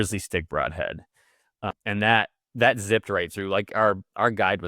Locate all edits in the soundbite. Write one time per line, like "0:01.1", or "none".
0:01.7